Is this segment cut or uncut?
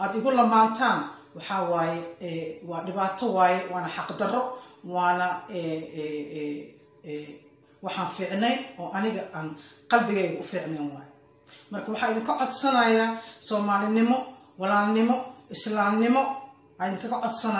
cut